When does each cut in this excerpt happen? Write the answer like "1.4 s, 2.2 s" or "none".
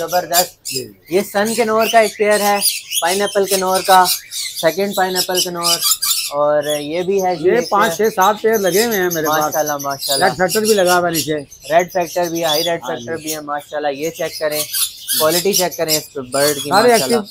none